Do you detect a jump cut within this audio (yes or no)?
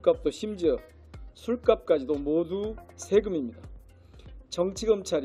no